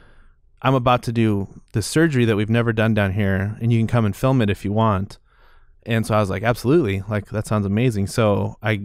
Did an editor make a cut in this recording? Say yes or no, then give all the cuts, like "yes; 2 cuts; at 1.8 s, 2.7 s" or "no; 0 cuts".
no; 0 cuts